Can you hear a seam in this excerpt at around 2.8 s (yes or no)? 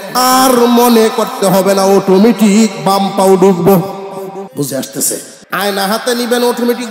no